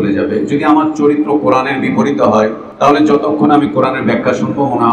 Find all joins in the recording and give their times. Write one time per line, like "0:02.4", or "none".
0:02.6